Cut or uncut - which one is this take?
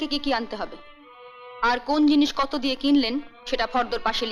uncut